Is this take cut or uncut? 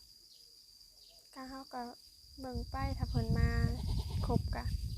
uncut